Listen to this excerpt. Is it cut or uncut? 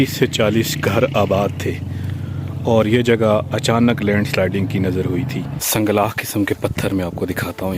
cut